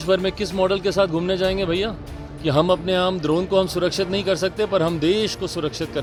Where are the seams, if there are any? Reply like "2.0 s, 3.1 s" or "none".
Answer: none